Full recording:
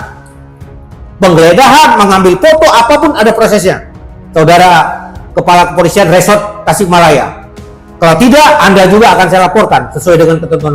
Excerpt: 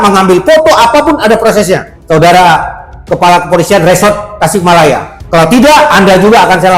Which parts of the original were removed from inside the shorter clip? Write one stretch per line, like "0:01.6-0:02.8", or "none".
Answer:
0:03.9-0:04.2
0:07.4-0:07.8